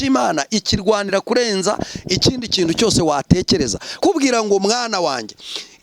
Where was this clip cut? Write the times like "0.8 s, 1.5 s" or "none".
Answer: 4.0 s